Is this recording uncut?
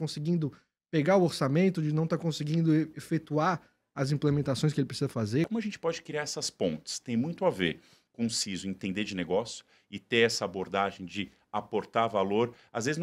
no; 1 cut; at 5.5 s

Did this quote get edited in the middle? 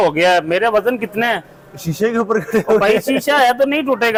no; 0 cuts

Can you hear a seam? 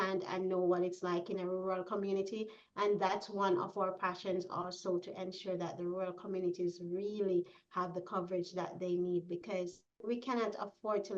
yes; 1 cut; at 10.0 s

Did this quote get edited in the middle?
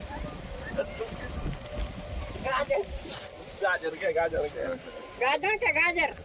no; 0 cuts

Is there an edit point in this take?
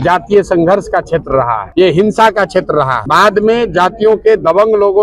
yes; 2 cuts; at 1.6 s, 3.0 s

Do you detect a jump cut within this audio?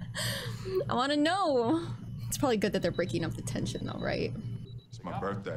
no; 0 cuts

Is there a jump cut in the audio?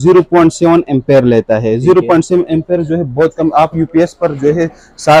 no; 0 cuts

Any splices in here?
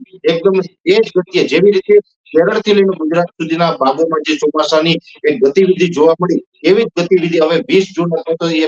no; 0 cuts

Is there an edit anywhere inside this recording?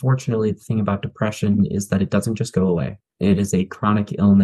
no; 0 cuts

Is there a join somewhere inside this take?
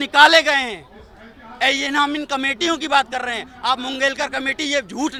no; 0 cuts

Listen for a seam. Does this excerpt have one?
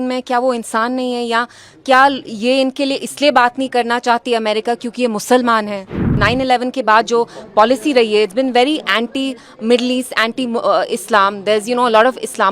yes; 1 cut; at 6.2 s

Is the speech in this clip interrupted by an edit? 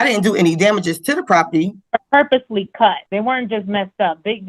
yes; 2 cuts; at 1.8 s, 3.0 s

